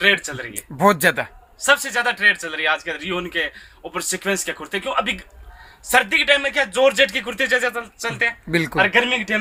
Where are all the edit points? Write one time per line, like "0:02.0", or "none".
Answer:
none